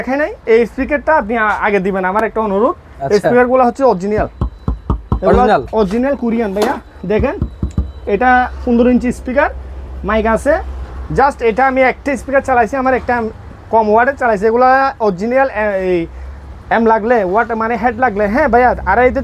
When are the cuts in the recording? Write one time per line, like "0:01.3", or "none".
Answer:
none